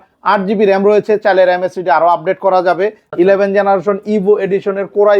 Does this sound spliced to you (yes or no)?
yes